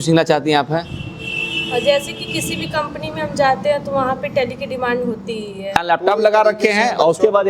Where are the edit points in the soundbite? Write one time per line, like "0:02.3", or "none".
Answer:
0:05.7